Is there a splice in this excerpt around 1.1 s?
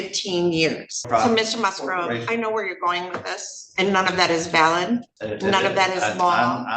yes; 2 cuts; at 1.1 s, 5.2 s

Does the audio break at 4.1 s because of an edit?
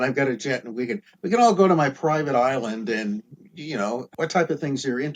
yes; 1 cut; at 4.1 s

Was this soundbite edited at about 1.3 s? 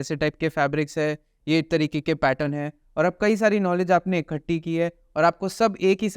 yes; 1 cut; at 1.3 s

